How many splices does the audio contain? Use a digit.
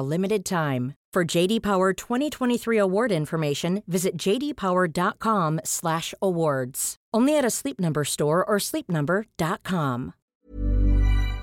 1